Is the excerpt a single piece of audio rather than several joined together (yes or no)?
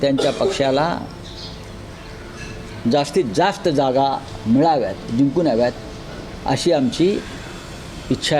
yes